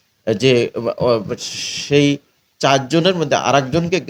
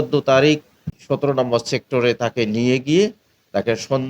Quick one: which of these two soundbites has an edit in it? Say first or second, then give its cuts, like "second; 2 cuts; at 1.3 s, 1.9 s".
second; 1 cut; at 0.9 s